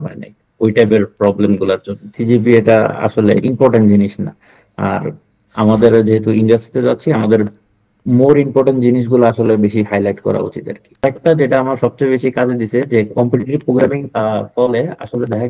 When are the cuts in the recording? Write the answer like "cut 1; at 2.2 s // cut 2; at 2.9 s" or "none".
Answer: cut 1; at 2.1 s // cut 2; at 11.0 s // cut 3; at 14.0 s